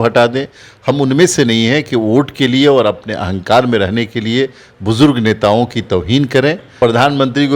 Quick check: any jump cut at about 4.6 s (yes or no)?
no